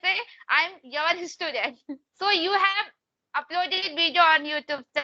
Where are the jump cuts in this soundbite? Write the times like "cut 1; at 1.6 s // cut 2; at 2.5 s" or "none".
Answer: cut 1; at 2.1 s

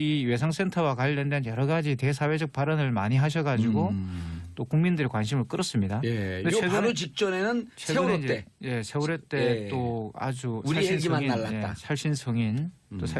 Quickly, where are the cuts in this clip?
cut 1; at 1.6 s

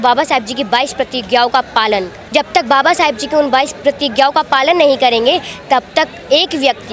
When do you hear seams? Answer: cut 1; at 2.2 s

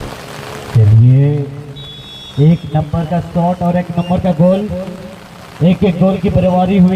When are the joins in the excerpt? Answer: none

